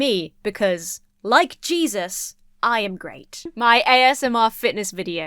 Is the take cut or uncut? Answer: cut